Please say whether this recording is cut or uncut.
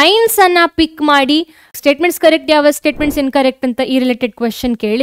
cut